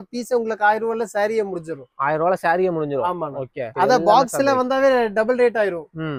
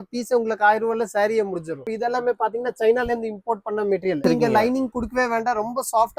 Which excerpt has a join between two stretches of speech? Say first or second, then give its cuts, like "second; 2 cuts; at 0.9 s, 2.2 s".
second; 2 cuts; at 1.9 s, 4.2 s